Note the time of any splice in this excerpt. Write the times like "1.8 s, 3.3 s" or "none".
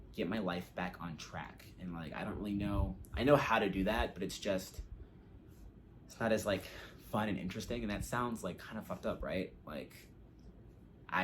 none